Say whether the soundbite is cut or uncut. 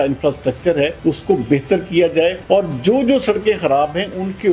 cut